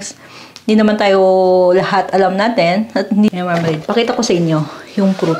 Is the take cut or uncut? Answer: cut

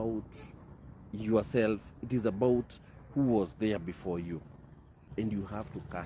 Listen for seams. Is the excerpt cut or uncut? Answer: cut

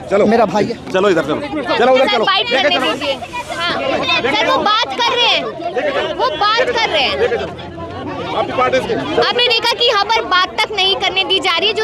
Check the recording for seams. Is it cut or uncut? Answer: uncut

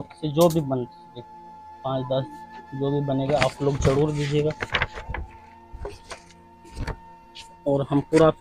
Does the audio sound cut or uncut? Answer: uncut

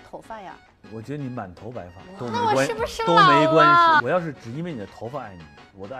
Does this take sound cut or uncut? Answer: cut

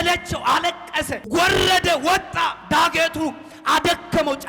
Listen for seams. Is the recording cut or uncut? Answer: cut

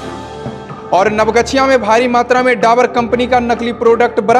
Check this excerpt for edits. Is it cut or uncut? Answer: uncut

